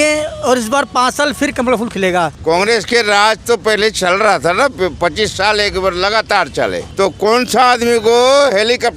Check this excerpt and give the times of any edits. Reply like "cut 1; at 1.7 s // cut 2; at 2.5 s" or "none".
cut 1; at 2.4 s // cut 2; at 6.8 s

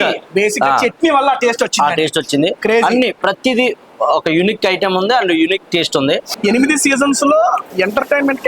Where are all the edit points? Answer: cut 1; at 6.3 s // cut 2; at 7.7 s

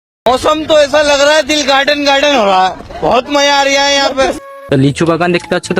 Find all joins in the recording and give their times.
cut 1; at 4.5 s

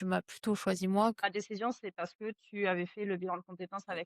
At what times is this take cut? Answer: cut 1; at 1.2 s

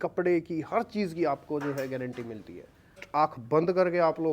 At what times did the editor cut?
cut 1; at 3.0 s

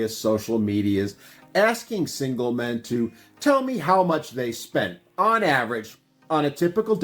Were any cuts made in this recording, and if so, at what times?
none

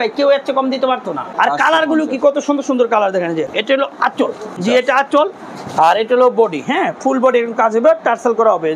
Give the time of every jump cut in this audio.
cut 1; at 1.2 s // cut 2; at 3.5 s // cut 3; at 4.6 s

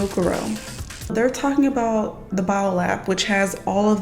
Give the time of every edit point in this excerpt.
cut 1; at 1.1 s

